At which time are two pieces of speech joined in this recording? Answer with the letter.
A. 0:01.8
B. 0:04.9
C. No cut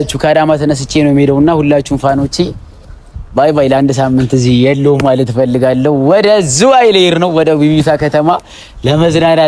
C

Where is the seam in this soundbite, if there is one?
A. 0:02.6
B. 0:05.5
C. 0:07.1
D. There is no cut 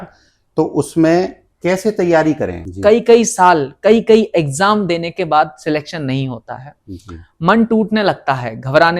A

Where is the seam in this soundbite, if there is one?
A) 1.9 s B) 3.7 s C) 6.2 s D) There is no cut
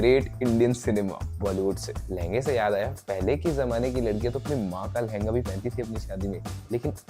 A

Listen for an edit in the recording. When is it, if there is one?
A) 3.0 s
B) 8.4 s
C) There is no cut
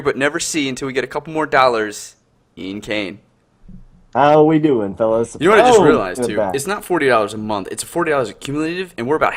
C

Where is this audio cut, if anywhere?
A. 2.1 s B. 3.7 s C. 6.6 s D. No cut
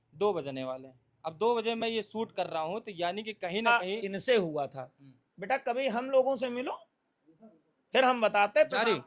B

